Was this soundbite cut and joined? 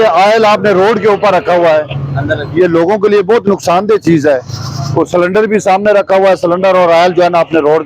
no; 0 cuts

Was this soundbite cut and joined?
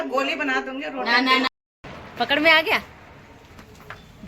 yes; 1 cut; at 1.5 s

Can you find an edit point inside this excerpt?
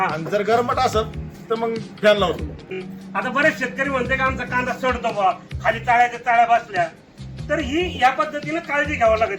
yes; 1 cut; at 2.7 s

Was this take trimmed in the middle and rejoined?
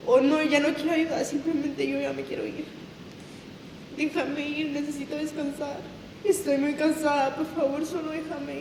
yes; 1 cut; at 6.0 s

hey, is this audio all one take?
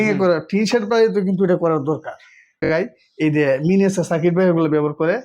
no; 1 cut; at 2.7 s

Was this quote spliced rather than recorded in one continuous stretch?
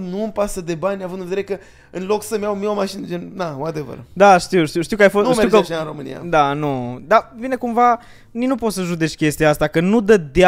no; 0 cuts

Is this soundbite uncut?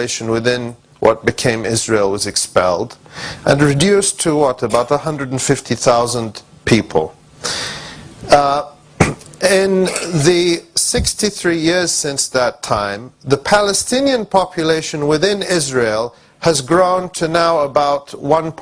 no; 1 cut; at 12.9 s

